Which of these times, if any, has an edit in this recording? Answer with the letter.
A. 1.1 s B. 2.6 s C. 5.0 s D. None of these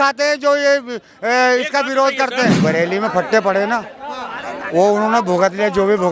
B